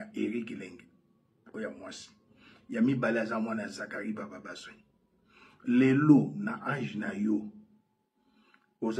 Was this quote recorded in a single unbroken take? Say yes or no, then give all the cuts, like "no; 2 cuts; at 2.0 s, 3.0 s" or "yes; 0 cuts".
yes; 0 cuts